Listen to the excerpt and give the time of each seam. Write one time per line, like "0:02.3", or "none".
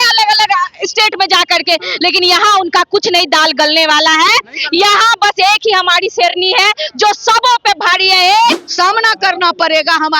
0:08.6